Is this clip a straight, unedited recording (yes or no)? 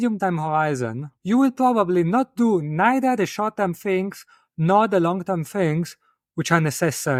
yes